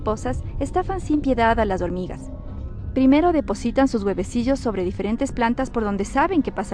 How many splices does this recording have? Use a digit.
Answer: 1